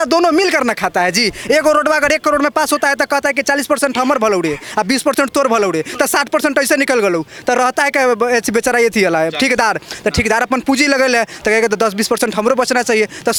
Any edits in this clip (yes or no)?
no